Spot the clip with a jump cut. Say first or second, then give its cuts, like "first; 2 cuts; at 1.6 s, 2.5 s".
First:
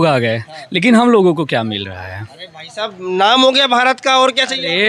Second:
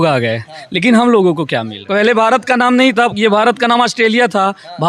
second; 1 cut; at 1.8 s